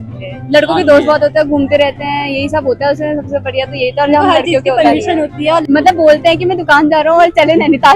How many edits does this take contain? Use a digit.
1